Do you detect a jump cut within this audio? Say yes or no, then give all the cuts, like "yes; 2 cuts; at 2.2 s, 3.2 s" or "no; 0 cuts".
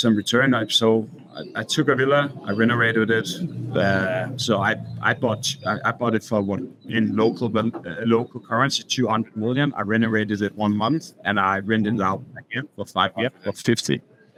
no; 0 cuts